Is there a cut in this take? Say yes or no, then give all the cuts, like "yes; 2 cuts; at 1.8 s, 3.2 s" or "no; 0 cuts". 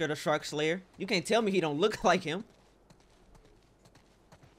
no; 0 cuts